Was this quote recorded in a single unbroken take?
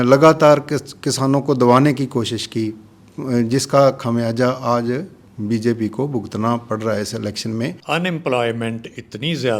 no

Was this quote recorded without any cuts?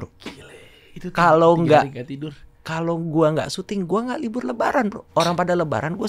no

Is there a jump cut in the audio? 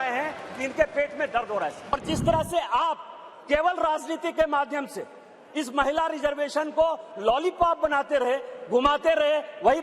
yes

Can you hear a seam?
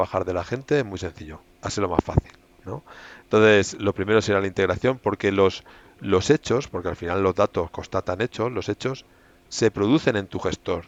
no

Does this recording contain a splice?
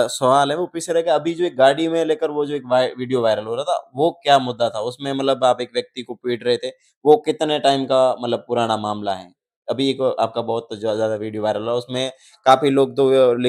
no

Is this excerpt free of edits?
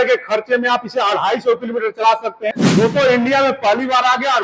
no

